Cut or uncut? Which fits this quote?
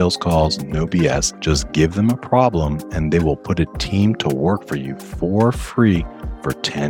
cut